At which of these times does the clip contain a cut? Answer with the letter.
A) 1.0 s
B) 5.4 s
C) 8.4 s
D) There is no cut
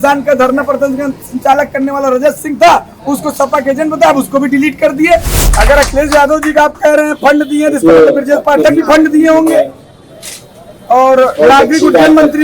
B